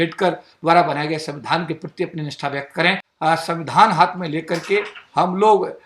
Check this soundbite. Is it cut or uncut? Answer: cut